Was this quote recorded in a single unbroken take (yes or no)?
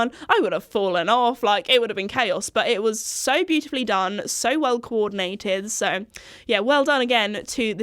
yes